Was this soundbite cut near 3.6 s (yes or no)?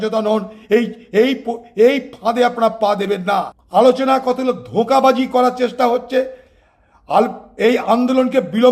yes